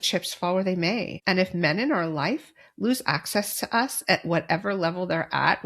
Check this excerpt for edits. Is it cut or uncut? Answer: cut